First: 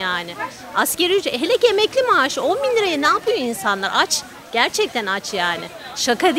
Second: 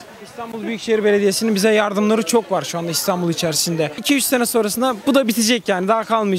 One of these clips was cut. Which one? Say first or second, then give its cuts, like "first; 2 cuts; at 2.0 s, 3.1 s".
second; 1 cut; at 4.0 s